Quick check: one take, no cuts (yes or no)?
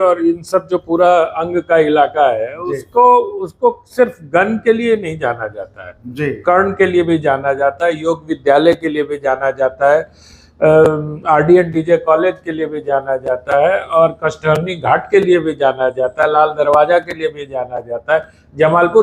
yes